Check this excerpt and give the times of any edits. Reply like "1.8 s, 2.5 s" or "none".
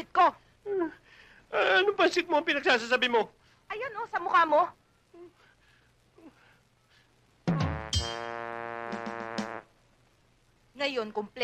none